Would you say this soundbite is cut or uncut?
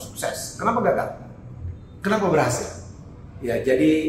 uncut